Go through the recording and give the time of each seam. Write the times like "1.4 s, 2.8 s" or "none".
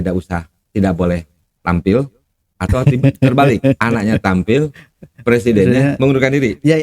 1.5 s